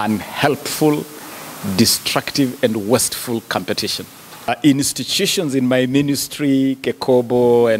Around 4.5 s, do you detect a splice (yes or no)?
yes